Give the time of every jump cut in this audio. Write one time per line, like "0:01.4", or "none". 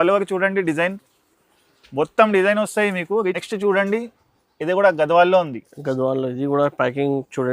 0:03.4